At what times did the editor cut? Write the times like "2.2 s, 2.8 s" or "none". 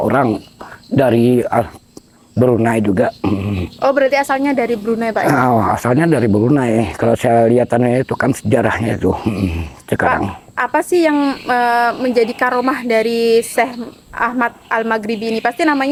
none